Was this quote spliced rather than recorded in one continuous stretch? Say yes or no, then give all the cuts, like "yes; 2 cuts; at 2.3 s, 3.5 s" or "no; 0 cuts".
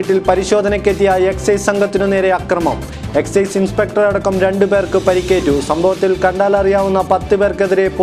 no; 0 cuts